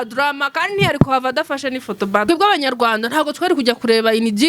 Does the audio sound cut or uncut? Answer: cut